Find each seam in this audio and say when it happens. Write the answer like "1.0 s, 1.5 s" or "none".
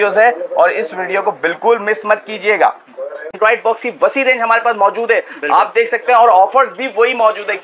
3.3 s

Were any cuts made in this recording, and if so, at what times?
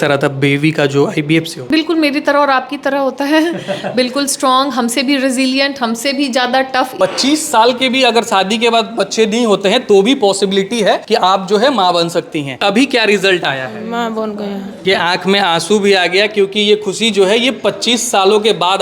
1.6 s, 6.9 s, 11.0 s, 12.5 s, 14.8 s

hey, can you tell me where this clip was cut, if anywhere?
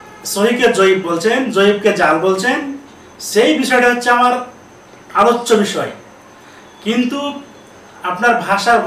none

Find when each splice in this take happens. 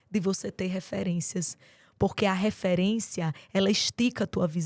none

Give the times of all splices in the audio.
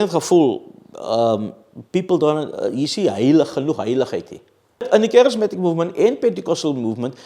4.8 s

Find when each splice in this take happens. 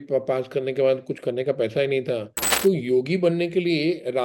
2.5 s

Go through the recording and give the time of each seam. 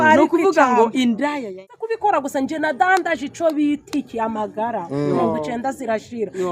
1.5 s

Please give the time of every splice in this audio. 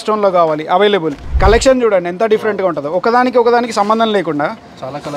1.2 s

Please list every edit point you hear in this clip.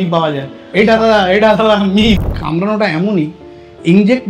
2.3 s

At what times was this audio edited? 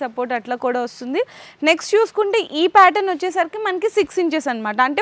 none

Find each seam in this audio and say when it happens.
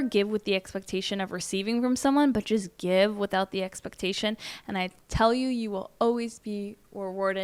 none

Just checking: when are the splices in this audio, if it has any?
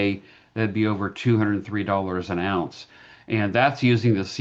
none

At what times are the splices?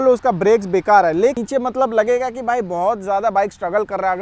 1.4 s

